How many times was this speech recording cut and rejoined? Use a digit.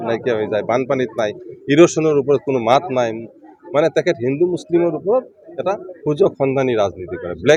0